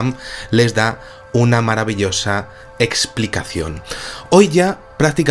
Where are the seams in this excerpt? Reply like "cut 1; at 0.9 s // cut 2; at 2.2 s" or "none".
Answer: cut 1; at 3.8 s